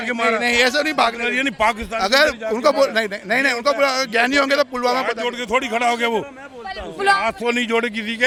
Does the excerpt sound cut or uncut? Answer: uncut